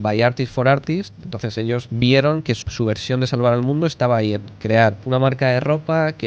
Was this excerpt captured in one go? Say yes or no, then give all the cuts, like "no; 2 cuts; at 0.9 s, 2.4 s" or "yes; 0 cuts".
no; 3 cuts; at 1.9 s, 2.6 s, 5.0 s